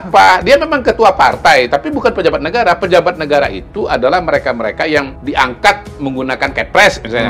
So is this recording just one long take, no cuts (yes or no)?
no